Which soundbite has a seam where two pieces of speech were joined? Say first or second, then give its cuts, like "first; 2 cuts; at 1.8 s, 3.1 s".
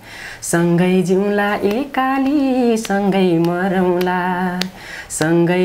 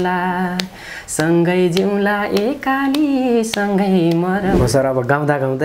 second; 1 cut; at 4.5 s